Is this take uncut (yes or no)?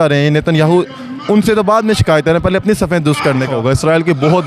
no